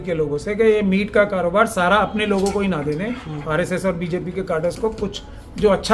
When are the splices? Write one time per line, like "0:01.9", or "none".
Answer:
none